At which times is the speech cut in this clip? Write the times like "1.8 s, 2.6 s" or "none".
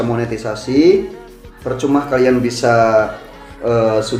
none